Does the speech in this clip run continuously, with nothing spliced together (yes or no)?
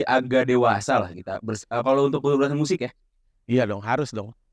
yes